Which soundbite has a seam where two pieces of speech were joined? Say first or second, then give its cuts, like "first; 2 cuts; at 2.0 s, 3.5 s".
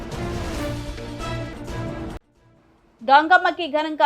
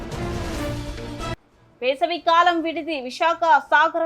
second; 1 cut; at 1.3 s